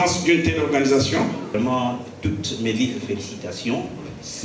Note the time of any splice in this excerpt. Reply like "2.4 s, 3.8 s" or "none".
1.5 s